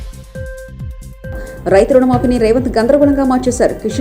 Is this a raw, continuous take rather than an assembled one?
no; 1 cut; at 1.3 s

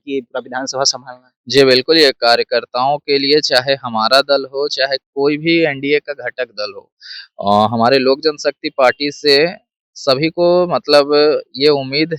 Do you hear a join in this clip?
no; 0 cuts

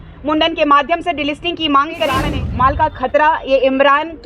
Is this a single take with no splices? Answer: no; 1 cut; at 2.4 s

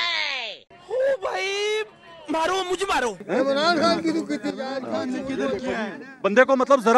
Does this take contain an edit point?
no; 0 cuts

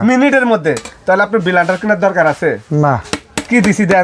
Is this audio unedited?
yes; 0 cuts

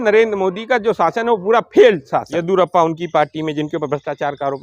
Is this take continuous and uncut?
no; 1 cut; at 2.3 s

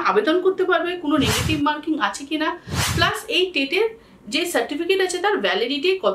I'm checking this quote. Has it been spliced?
no; 0 cuts

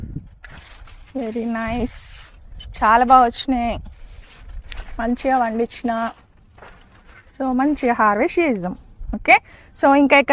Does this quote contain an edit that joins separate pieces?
no; 0 cuts

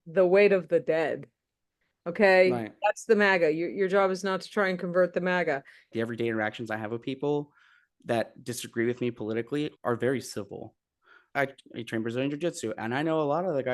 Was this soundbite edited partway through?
yes; 1 cut; at 5.8 s

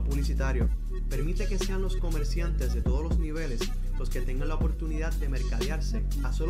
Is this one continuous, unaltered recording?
yes; 0 cuts

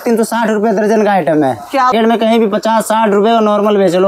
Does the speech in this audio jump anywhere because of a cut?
yes; 1 cut; at 1.9 s

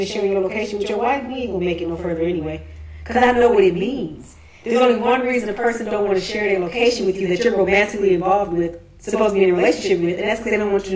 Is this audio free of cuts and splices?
no; 1 cut; at 3.3 s

